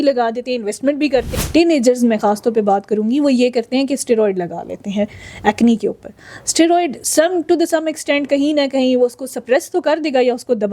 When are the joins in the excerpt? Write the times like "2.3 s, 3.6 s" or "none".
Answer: 1.3 s